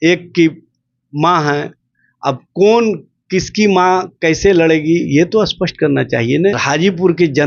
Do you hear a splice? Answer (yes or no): yes